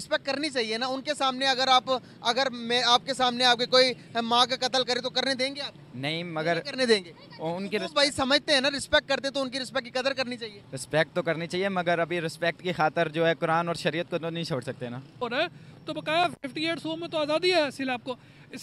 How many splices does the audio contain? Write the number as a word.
one